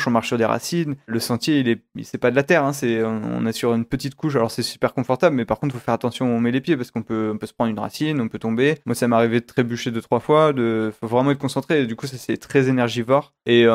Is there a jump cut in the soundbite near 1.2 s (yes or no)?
yes